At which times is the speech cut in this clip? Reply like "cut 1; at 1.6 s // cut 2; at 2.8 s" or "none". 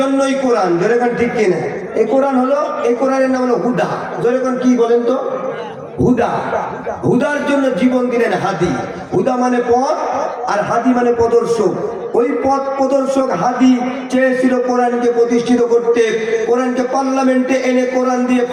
none